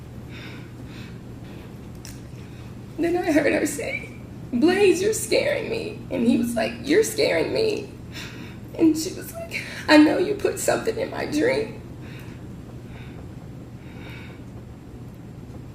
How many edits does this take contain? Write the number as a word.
one